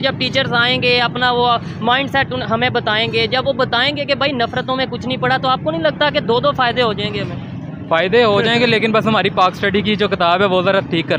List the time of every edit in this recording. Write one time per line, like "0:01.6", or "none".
none